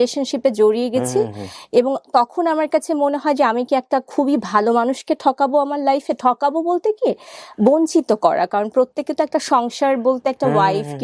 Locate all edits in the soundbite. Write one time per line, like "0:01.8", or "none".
none